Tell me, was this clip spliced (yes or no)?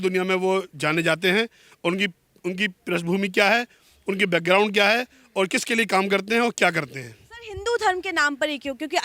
no